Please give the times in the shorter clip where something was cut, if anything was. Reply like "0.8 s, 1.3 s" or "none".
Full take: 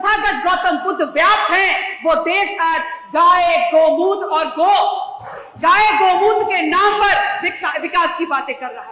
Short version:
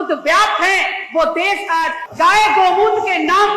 2.0 s